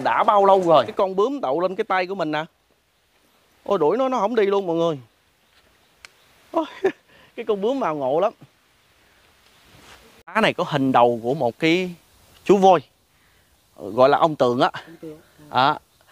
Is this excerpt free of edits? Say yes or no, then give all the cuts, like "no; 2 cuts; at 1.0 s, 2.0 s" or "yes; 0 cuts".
no; 2 cuts; at 0.9 s, 10.4 s